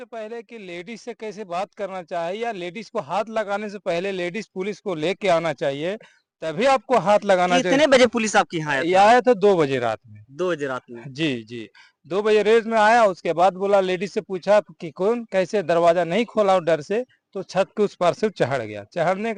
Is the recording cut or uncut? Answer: uncut